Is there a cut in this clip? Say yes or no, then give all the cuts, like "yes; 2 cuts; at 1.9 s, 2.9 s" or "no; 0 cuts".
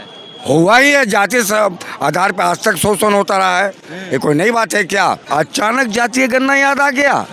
yes; 1 cut; at 5.2 s